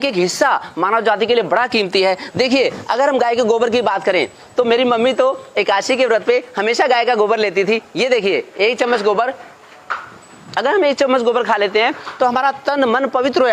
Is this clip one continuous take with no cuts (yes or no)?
no